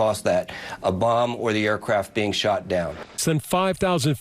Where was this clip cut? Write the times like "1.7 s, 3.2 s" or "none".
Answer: 3.2 s